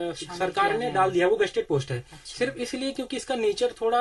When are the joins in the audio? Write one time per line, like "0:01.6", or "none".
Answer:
none